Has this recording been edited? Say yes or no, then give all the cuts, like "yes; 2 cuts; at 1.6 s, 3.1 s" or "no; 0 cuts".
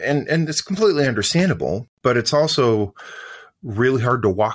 yes; 1 cut; at 1.9 s